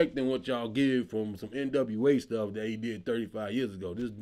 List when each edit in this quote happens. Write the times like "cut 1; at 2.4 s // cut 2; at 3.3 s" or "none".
none